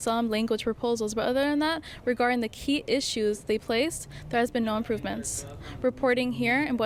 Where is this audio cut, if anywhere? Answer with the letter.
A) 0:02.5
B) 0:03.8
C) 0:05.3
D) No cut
D